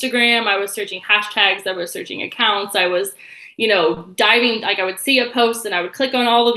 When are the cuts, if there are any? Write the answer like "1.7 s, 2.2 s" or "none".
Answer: none